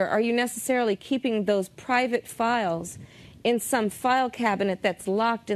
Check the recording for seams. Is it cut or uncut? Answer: uncut